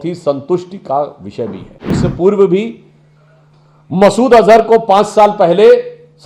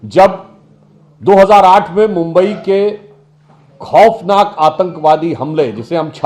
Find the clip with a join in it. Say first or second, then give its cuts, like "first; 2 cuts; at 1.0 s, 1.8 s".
first; 1 cut; at 2.0 s